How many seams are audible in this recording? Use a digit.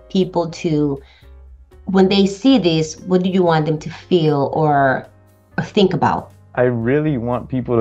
1